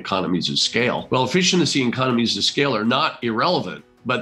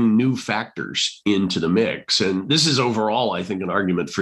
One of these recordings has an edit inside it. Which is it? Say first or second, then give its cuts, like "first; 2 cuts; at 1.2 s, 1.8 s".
first; 2 cuts; at 1.0 s, 2.8 s